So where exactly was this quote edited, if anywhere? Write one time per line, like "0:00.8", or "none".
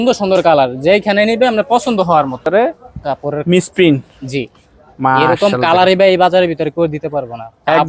0:02.4